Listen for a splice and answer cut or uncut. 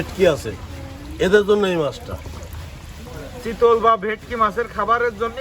uncut